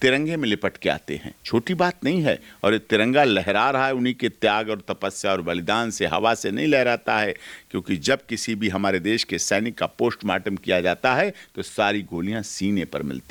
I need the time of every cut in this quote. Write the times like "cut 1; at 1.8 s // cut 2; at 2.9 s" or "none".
none